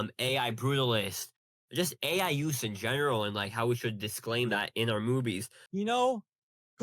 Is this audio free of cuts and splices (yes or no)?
no